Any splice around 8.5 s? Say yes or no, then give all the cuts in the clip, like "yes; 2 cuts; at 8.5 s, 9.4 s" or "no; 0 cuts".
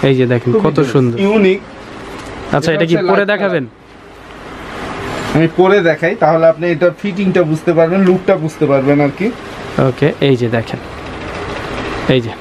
no; 1 cut; at 1.2 s